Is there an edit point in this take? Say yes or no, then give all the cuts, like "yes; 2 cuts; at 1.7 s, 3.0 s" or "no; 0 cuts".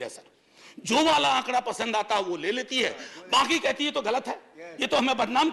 no; 0 cuts